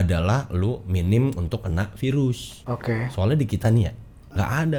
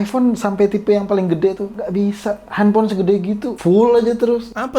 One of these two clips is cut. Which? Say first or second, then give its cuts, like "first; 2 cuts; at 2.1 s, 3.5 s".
second; 1 cut; at 1.7 s